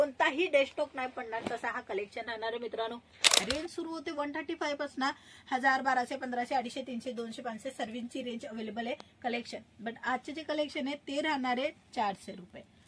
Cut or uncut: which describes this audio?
cut